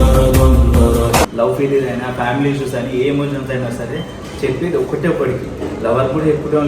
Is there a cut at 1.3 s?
yes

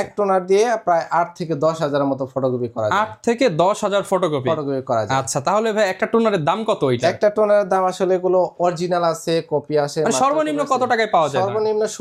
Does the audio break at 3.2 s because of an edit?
no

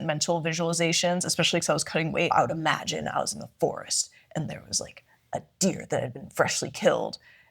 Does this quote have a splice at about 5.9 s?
no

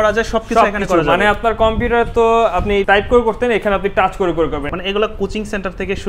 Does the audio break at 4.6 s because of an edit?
yes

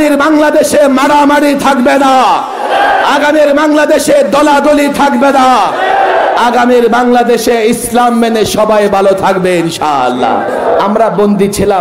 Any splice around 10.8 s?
yes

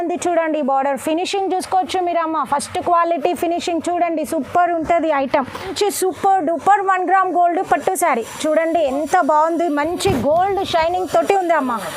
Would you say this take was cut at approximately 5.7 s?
yes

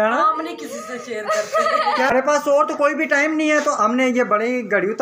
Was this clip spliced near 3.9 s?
no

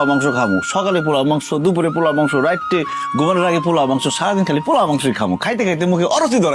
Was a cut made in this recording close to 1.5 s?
no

